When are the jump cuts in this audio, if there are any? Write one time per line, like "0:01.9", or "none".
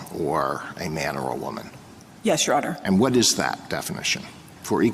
none